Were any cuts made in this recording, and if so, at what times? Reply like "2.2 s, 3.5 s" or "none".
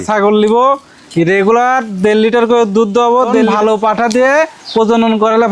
3.4 s